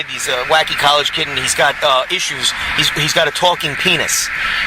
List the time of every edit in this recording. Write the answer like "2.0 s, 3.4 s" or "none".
2.8 s